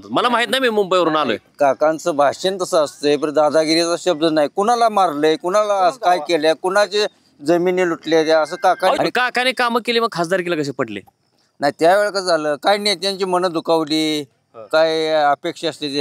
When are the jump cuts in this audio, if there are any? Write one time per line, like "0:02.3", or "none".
0:09.0